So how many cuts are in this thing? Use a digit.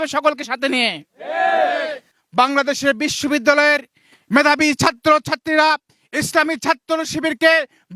1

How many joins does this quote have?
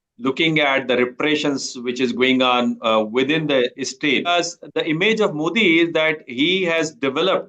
1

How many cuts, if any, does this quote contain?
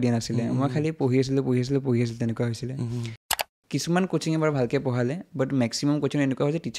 1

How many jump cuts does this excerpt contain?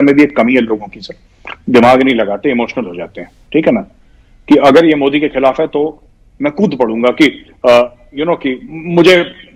0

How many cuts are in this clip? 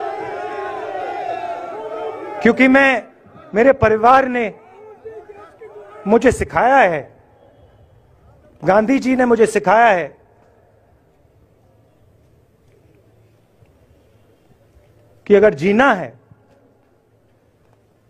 0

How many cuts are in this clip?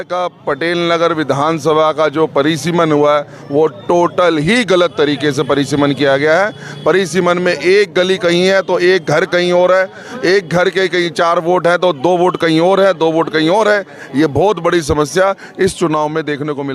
0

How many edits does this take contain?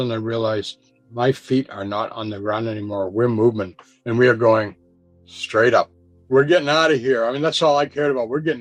0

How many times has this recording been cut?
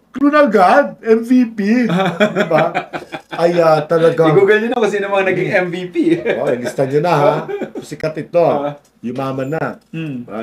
0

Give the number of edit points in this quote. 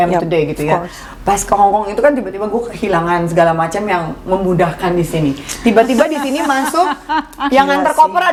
0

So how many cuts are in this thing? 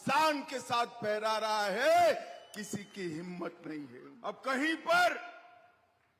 1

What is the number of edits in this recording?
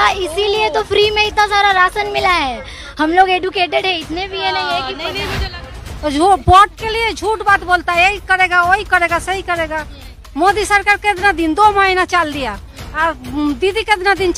1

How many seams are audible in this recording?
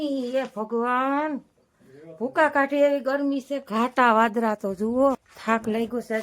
1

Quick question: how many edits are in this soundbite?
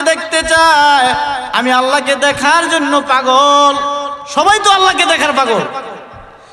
1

